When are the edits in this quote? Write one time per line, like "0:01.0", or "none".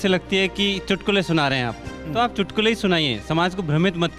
none